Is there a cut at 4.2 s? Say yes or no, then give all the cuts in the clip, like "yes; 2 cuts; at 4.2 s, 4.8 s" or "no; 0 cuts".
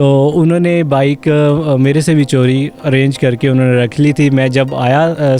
no; 0 cuts